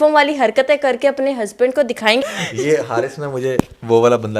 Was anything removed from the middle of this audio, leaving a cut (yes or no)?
yes